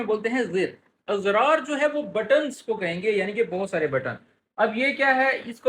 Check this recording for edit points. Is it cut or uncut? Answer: cut